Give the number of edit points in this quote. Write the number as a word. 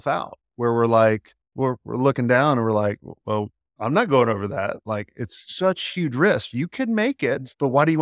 one